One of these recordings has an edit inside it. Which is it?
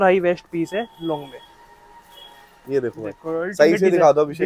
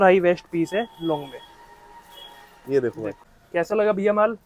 second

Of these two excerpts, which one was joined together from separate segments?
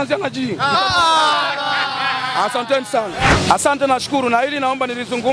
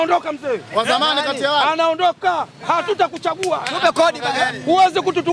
first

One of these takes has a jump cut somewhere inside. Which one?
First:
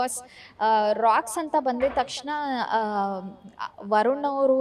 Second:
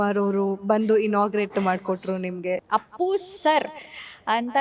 second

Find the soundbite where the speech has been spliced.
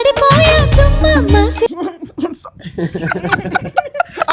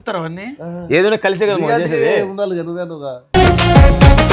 first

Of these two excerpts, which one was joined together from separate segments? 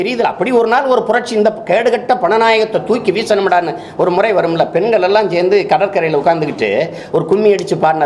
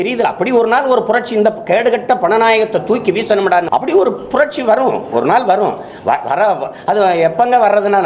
second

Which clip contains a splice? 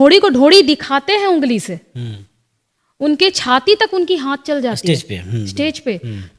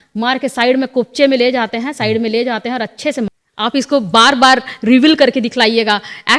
second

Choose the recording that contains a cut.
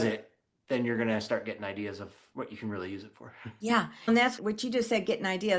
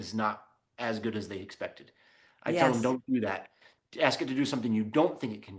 first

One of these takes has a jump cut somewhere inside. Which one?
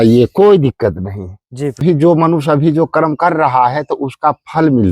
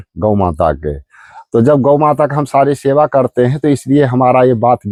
first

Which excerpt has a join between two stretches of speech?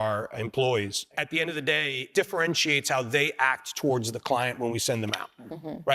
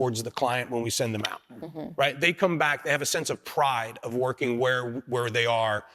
first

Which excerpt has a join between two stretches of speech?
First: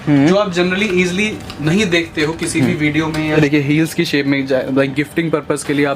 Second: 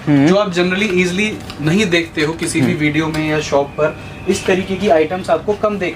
first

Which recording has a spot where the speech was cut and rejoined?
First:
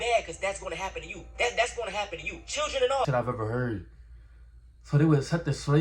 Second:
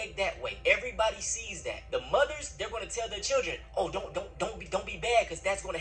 first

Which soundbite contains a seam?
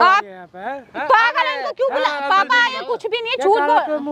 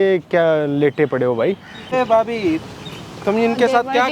second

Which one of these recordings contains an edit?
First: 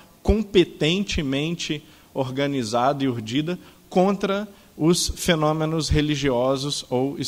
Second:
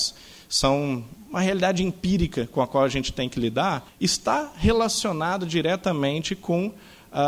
second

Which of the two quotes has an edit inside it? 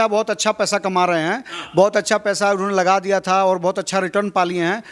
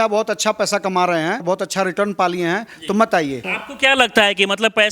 second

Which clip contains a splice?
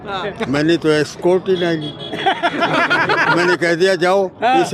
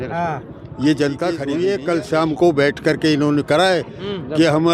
second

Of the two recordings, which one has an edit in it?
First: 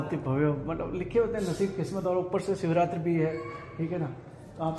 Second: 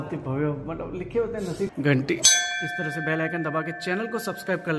second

